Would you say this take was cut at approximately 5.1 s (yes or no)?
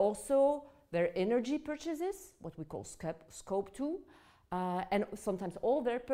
yes